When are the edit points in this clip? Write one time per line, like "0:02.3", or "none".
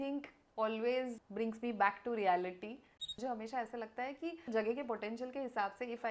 0:01.2
0:03.0
0:04.5